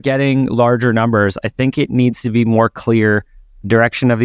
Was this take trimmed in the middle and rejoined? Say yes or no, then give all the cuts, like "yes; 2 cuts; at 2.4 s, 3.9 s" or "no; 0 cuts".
no; 0 cuts